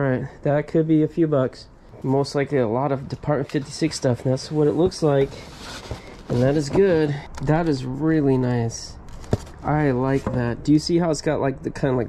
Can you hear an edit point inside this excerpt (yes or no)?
yes